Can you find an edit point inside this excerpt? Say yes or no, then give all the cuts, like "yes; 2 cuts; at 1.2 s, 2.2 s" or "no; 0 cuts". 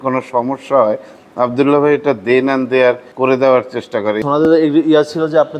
yes; 2 cuts; at 3.1 s, 4.2 s